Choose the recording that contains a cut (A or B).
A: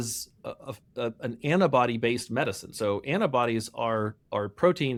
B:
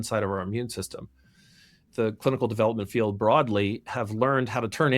B